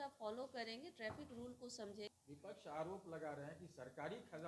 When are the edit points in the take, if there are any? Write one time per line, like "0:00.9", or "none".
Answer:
0:02.1